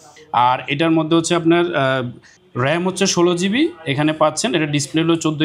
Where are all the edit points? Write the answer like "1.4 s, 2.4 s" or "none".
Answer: none